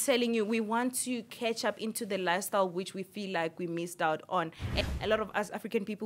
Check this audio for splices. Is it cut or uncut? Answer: cut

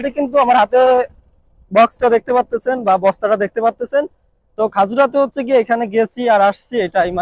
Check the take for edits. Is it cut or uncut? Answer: uncut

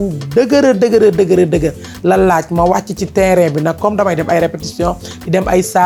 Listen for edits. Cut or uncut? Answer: uncut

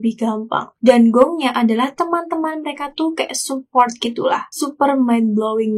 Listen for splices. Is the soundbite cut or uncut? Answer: uncut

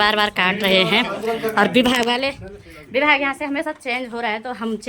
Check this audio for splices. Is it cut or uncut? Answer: uncut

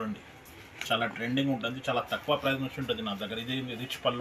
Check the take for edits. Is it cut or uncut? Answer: uncut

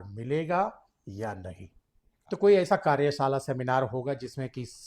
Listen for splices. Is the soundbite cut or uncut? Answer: cut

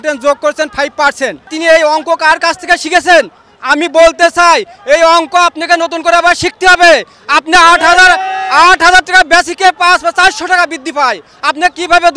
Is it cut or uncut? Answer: cut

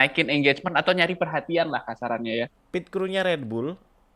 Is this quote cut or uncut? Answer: cut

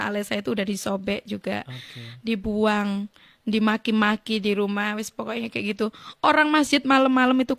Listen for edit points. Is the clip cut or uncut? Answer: uncut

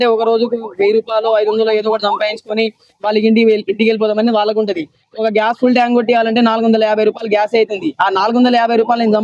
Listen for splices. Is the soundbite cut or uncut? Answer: uncut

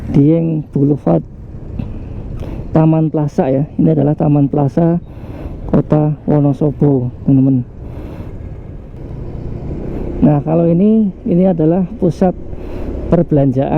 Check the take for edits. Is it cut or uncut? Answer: cut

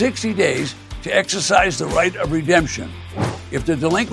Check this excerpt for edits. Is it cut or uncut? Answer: uncut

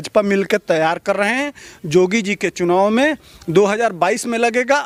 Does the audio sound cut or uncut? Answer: uncut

